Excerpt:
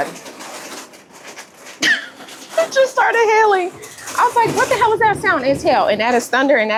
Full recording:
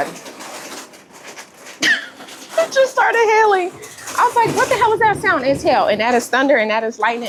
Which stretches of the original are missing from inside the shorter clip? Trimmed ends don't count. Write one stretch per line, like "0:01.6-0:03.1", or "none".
none

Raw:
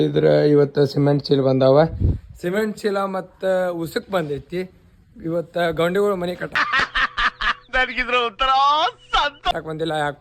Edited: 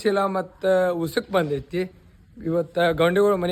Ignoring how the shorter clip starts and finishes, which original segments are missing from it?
none

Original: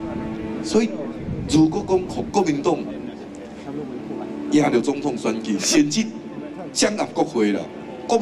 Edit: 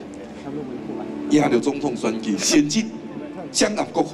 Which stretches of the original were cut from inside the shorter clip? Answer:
none

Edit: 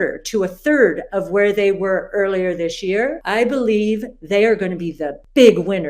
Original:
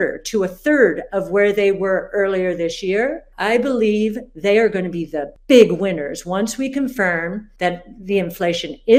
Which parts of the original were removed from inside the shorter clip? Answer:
0:03.2-0:03.3

